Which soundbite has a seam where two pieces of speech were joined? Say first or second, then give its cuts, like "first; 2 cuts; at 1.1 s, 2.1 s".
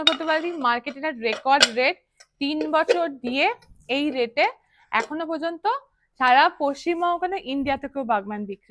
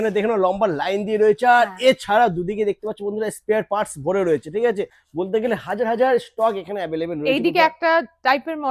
second; 1 cut; at 5.0 s